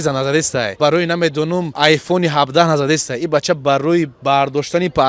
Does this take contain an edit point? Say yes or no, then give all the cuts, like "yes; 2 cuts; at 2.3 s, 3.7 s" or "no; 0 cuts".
yes; 2 cuts; at 0.8 s, 1.8 s